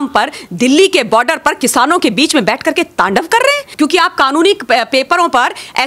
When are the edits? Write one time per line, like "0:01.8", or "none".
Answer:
0:03.7